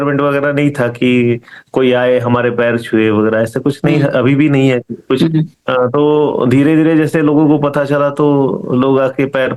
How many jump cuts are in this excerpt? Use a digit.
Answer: 1